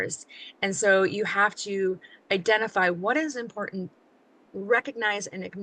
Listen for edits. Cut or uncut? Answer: cut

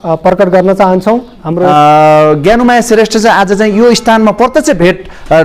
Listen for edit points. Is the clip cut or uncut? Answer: cut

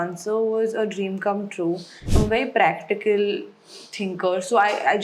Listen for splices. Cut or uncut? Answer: cut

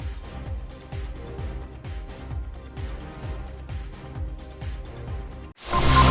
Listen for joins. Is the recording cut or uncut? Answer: uncut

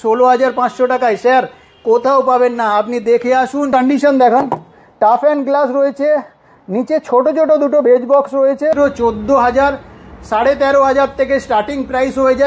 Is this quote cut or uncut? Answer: cut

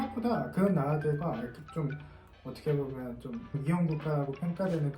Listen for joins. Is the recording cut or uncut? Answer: cut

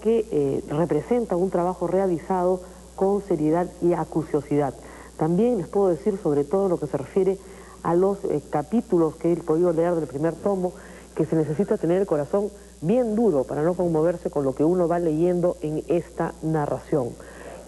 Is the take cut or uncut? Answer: uncut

